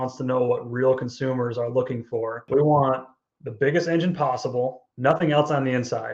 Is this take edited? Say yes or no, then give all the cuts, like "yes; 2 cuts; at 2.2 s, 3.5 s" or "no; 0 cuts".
yes; 2 cuts; at 2.4 s, 4.9 s